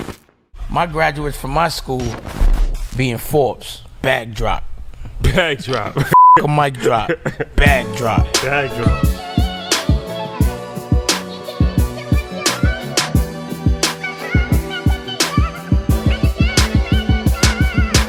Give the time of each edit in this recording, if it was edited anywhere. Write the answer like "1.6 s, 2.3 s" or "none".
none